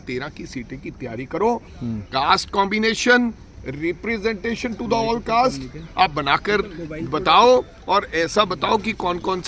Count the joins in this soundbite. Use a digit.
0